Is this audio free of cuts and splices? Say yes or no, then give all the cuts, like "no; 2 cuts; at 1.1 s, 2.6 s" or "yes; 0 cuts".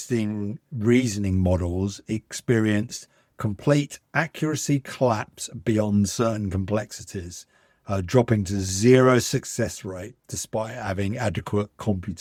yes; 0 cuts